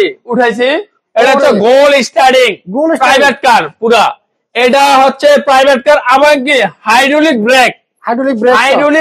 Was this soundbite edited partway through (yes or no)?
no